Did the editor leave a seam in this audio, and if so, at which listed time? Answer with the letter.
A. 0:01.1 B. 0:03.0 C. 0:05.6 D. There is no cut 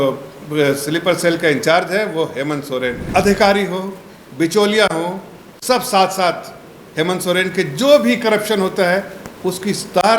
B